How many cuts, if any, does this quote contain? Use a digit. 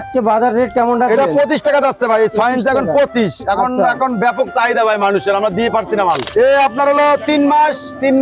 1